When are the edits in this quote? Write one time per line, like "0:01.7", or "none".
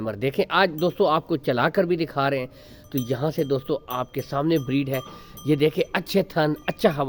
none